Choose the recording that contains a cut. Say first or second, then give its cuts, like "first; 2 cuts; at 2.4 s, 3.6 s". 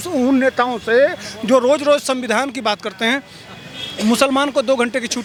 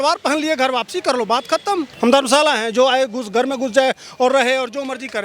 second; 1 cut; at 1.9 s